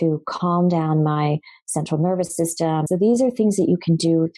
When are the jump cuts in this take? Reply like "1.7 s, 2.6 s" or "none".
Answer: 2.8 s